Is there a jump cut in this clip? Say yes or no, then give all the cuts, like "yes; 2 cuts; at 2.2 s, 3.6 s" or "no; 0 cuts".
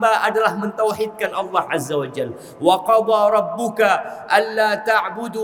no; 0 cuts